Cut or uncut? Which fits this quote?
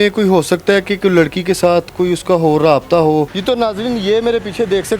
cut